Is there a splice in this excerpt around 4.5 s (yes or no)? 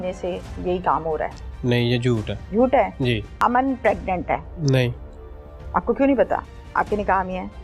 yes